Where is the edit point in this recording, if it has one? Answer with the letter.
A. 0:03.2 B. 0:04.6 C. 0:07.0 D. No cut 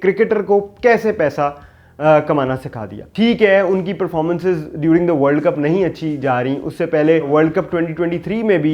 D